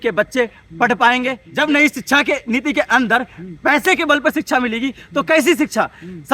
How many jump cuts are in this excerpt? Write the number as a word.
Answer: one